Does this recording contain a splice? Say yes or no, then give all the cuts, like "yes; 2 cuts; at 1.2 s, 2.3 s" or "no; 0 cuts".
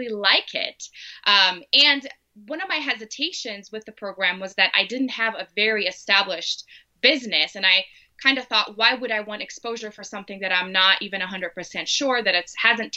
no; 0 cuts